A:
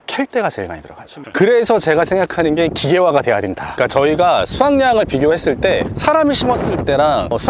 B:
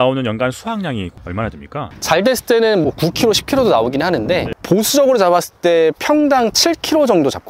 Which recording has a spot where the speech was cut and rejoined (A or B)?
A